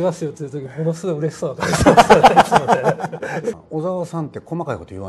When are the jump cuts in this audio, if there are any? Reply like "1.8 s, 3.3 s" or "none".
3.5 s